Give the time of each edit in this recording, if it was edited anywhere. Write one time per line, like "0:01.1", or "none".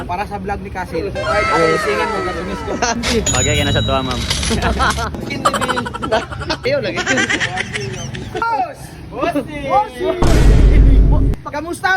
0:03.0
0:05.1
0:06.6
0:08.4